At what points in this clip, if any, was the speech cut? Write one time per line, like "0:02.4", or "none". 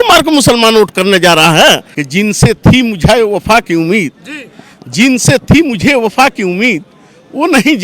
0:01.9